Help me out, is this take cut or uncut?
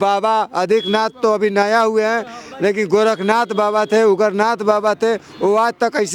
uncut